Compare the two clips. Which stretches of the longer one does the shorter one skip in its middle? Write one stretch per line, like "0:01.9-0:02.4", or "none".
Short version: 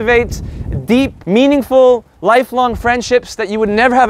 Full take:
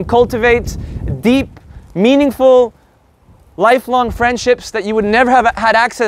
0:01.5-0:01.9
0:02.8-0:03.5